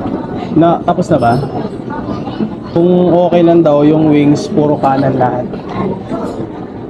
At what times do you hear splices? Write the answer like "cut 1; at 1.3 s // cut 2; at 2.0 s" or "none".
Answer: none